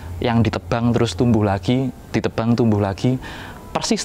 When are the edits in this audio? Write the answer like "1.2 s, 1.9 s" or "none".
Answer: none